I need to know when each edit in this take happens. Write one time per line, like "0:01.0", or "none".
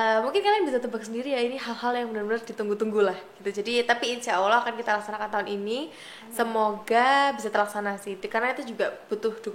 none